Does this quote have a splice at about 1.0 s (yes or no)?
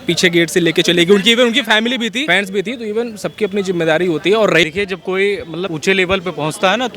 no